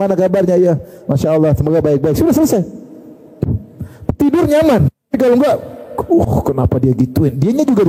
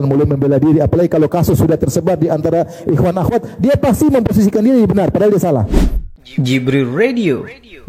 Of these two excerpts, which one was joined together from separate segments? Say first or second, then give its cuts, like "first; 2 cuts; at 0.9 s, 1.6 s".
second; 1 cut; at 5.7 s